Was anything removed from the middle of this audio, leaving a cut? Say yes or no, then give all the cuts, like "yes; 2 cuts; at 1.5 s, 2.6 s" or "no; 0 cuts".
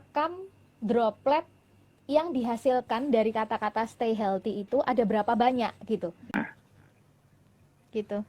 yes; 1 cut; at 6.3 s